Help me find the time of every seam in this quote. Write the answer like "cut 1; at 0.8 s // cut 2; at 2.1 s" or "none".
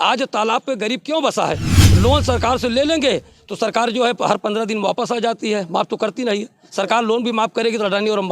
cut 1; at 1.8 s